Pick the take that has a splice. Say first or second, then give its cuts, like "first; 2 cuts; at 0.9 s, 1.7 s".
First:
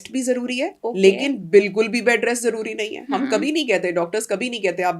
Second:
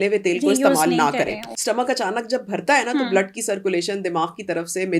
second; 1 cut; at 1.5 s